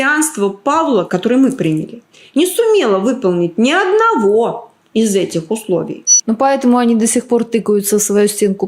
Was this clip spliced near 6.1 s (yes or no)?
yes